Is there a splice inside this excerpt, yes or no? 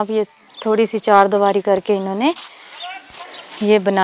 no